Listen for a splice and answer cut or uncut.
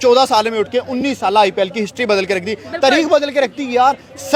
uncut